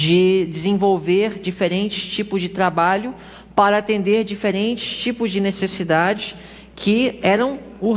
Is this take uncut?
yes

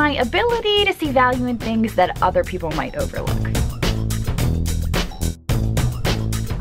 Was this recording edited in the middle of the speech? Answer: no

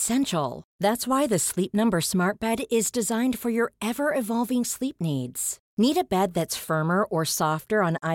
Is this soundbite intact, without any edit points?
yes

